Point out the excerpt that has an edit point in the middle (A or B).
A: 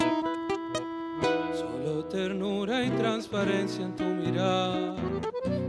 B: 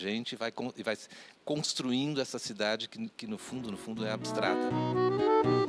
B